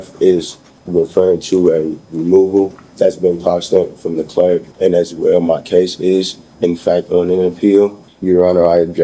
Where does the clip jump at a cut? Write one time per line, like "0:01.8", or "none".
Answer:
0:02.8
0:04.7
0:08.1